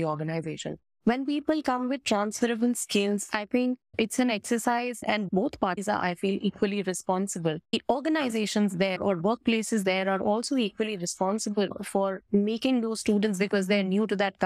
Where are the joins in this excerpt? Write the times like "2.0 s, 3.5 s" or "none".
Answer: none